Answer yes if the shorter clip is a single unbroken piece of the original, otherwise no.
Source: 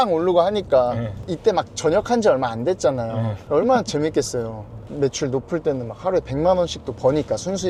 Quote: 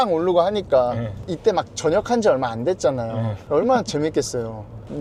yes